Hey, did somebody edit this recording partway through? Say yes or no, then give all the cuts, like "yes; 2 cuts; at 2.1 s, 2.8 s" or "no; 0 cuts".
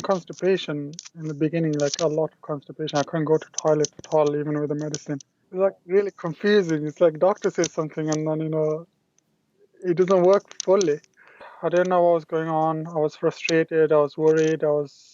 yes; 2 cuts; at 5.4 s, 11.4 s